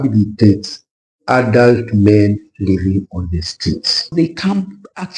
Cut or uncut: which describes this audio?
cut